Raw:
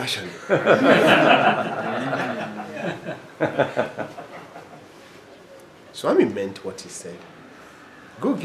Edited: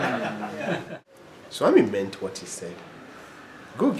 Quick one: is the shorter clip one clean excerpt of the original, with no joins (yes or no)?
no